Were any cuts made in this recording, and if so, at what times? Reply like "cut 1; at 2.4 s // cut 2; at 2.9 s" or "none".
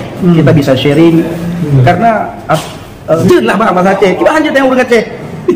cut 1; at 3.2 s